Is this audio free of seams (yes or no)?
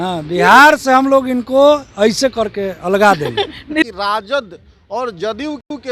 no